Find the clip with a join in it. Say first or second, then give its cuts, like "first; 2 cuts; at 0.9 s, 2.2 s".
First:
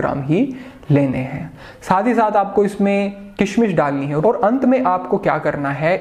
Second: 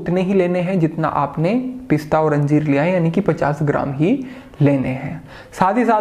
first; 1 cut; at 4.2 s